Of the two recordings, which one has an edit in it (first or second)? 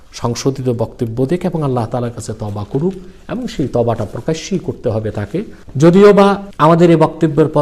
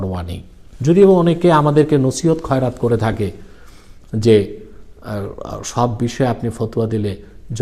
first